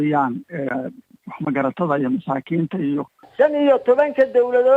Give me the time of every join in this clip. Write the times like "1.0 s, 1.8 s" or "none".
3.3 s

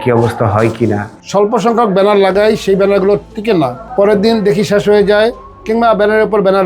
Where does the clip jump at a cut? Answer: 1.1 s, 3.8 s

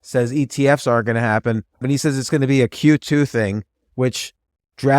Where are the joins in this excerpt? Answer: 1.8 s

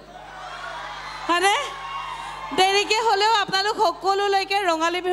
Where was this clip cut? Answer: none

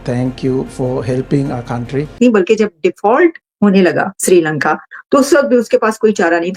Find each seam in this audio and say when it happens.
2.2 s

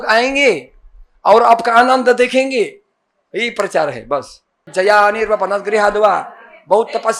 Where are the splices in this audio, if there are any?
4.7 s

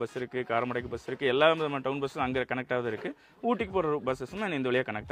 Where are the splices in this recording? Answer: none

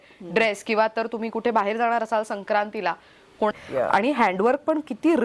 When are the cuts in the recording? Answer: 3.5 s

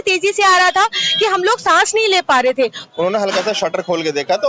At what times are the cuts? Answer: 2.8 s

